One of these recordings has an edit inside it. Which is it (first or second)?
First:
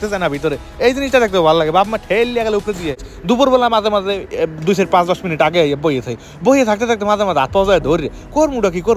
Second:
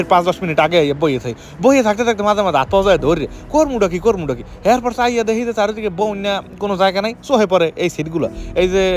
first